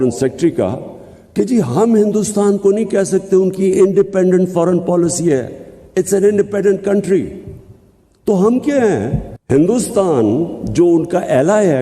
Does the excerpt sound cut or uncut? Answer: cut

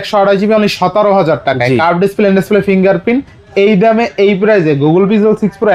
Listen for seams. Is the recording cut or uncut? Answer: uncut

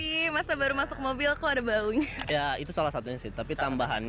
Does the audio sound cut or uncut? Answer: cut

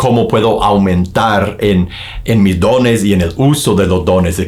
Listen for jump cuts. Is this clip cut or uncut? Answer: uncut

